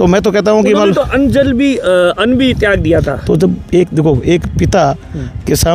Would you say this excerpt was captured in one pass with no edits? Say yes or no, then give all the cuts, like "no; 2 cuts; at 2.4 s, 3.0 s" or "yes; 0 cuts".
yes; 0 cuts